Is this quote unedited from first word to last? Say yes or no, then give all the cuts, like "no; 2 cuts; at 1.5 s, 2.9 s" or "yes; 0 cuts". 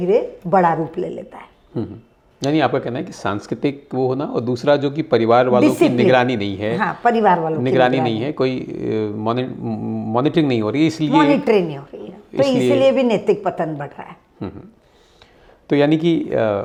yes; 0 cuts